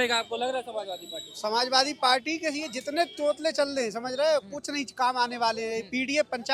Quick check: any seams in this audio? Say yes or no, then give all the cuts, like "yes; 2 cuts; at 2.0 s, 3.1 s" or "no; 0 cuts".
no; 0 cuts